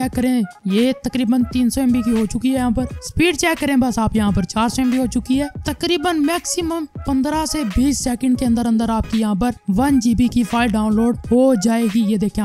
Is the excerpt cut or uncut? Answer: uncut